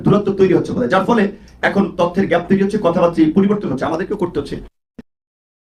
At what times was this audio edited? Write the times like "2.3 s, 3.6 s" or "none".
none

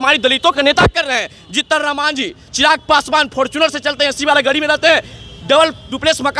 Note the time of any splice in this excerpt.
none

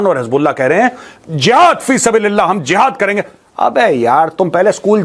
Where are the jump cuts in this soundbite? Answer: none

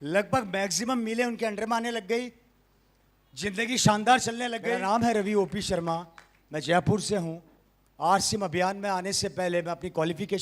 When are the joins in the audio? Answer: 4.5 s

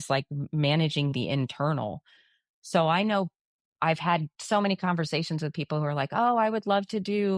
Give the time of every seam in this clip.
none

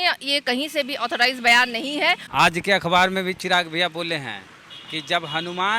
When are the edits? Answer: 2.2 s

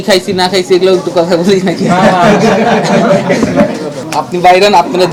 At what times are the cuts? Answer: none

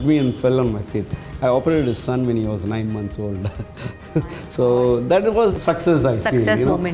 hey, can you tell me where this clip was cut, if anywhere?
5.5 s

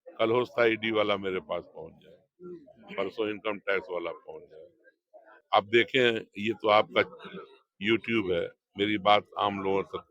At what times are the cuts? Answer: 5.4 s

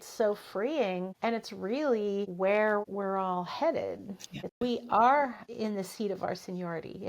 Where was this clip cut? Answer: 4.5 s

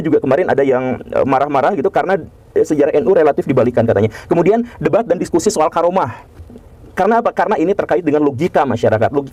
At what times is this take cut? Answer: none

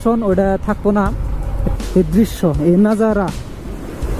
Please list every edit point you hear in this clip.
1.6 s

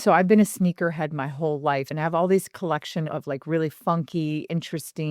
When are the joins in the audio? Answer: 1.9 s, 3.1 s

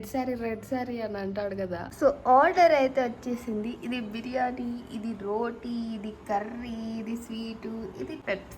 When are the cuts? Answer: 1.8 s

